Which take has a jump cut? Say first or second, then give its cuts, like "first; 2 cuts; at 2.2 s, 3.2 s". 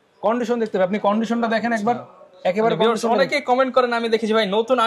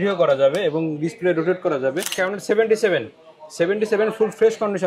second; 1 cut; at 2.1 s